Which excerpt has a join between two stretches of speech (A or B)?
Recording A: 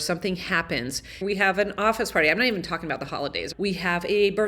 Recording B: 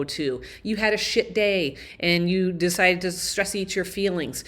A